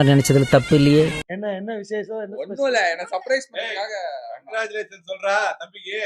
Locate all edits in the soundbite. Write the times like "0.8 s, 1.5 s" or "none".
1.3 s